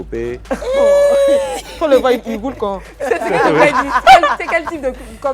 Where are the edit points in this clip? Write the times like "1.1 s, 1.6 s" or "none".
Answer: none